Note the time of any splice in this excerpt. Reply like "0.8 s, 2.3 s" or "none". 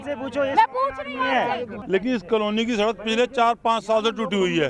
1.7 s

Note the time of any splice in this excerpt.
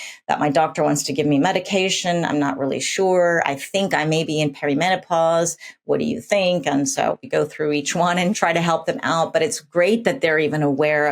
7.3 s, 8.4 s

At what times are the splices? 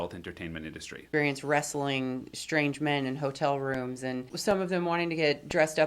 1.0 s, 4.3 s

